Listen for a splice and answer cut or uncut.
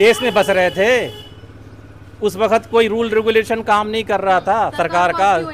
uncut